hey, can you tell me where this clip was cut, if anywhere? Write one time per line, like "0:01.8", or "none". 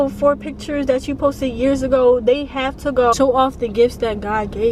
0:03.1